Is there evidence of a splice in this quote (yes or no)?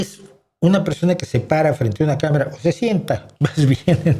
no